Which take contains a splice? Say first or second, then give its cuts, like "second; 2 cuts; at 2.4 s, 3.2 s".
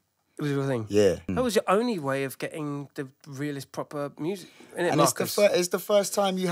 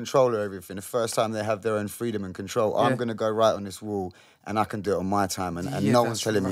first; 1 cut; at 1.3 s